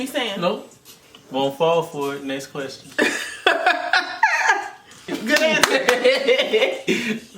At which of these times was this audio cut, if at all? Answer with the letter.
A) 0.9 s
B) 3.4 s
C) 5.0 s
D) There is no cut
C